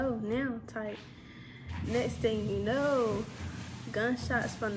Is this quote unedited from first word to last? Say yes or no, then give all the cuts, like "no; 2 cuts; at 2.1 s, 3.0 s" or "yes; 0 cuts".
yes; 0 cuts